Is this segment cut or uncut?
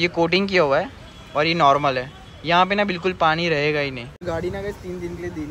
cut